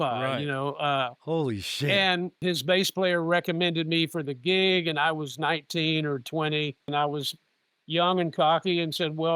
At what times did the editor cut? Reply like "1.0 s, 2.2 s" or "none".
2.4 s, 6.9 s

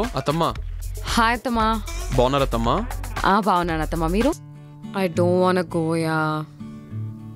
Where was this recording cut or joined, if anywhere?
4.5 s

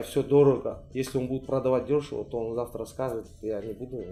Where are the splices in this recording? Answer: none

